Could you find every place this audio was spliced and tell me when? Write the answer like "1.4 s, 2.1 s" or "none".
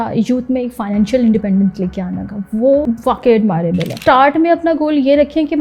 2.8 s, 4.1 s